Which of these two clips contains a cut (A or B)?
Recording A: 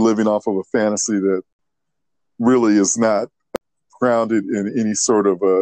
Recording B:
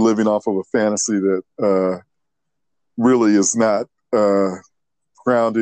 A